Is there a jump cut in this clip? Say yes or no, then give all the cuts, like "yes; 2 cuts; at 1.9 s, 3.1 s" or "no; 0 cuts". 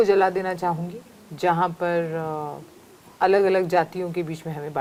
no; 0 cuts